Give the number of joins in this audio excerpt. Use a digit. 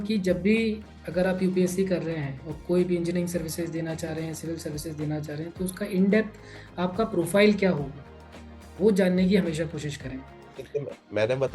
1